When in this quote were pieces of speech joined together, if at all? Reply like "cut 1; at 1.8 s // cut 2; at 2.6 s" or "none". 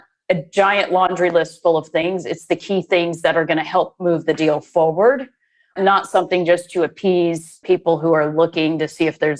cut 1; at 1.1 s // cut 2; at 2.0 s // cut 3; at 5.7 s // cut 4; at 7.6 s